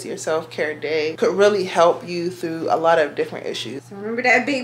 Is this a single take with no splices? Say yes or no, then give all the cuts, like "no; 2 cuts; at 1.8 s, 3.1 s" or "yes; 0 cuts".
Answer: no; 2 cuts; at 1.1 s, 3.7 s